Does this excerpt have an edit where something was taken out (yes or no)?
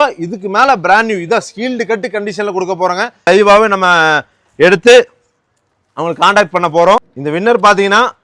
yes